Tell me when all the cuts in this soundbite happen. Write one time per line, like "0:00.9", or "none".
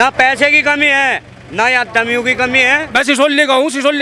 0:02.8